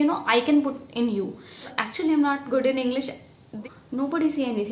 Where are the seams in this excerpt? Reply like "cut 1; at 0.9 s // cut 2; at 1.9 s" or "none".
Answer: cut 1; at 1.7 s // cut 2; at 3.6 s